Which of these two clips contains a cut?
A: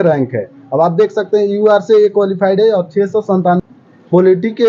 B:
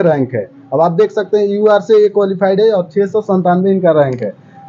A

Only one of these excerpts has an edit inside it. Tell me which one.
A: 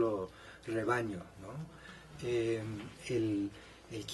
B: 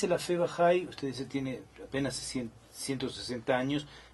A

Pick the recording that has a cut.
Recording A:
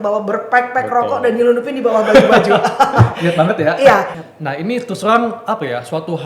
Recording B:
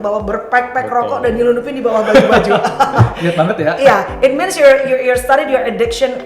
A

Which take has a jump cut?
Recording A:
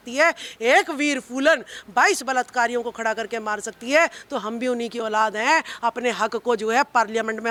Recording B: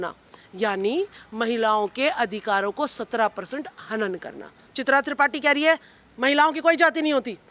B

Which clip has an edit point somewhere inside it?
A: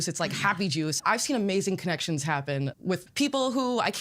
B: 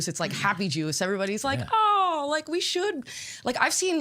A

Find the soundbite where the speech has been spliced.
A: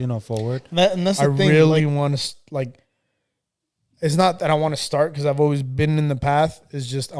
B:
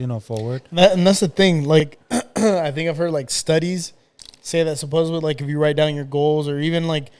A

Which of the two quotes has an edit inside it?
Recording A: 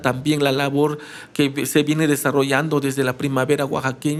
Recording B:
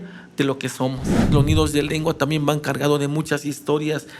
B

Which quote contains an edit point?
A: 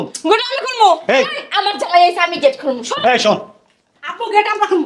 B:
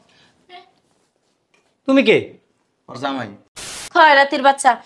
B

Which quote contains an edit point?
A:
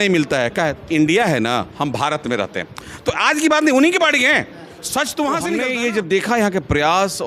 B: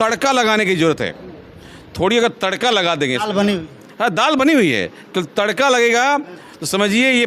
A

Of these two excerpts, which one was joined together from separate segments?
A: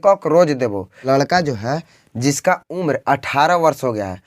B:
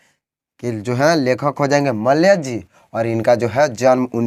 A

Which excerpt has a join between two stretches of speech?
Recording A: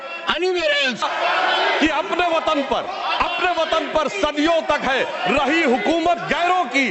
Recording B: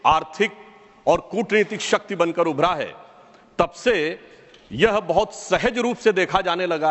A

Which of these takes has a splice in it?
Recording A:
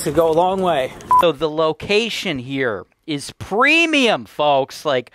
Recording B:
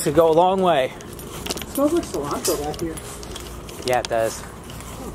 A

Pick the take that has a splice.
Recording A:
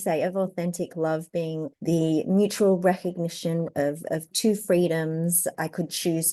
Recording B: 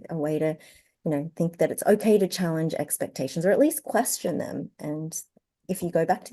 A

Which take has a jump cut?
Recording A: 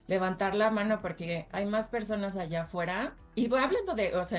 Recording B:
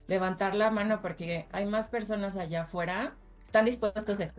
B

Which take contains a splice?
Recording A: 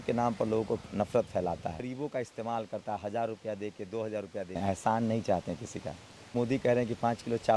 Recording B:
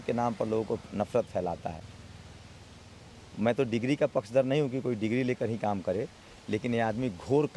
A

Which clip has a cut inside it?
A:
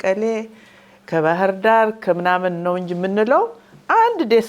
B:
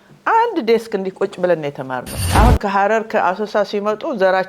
B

